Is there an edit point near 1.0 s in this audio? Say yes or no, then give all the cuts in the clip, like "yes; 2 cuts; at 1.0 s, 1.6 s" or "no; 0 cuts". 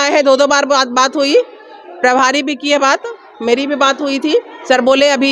no; 0 cuts